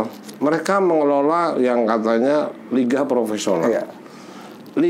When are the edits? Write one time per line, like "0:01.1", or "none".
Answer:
none